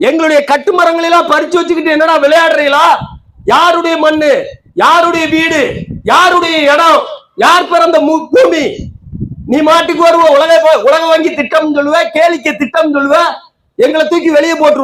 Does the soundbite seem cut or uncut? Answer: uncut